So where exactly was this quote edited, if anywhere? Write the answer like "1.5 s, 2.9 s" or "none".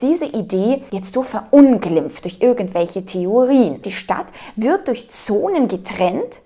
0.9 s, 3.9 s